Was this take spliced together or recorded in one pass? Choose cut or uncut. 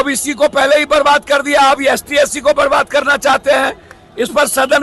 uncut